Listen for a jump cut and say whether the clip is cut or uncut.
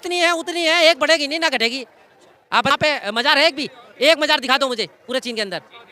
cut